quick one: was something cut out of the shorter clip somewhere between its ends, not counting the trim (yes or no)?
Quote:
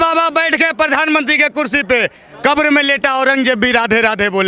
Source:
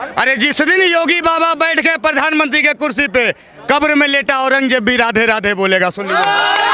no